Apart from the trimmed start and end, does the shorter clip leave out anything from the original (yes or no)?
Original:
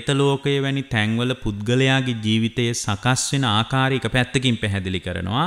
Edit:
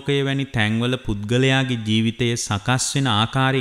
no